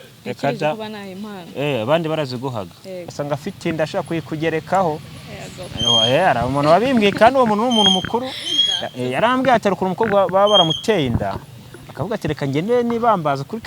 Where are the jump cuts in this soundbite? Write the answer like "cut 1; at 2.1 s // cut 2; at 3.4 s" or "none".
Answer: cut 1; at 3.1 s